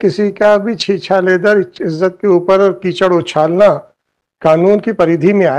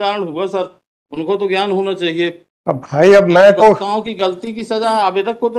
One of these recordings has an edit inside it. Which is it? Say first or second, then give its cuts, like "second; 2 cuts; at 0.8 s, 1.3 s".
second; 1 cut; at 2.5 s